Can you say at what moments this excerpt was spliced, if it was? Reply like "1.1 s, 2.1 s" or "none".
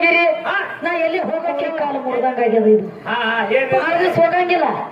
1.7 s